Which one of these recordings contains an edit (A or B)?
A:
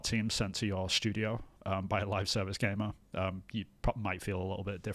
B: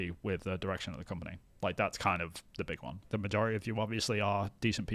B